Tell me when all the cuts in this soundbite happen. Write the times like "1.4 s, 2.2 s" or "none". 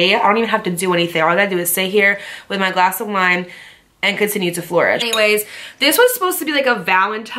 5.0 s